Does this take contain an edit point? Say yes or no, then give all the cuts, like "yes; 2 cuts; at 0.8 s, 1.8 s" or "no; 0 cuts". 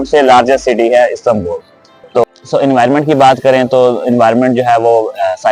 no; 0 cuts